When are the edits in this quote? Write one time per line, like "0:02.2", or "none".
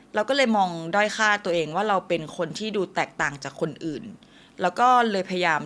none